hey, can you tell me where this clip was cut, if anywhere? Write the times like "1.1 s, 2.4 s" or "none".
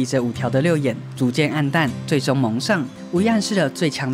2.9 s